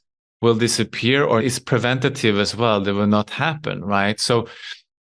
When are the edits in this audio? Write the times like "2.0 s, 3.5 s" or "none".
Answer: 1.4 s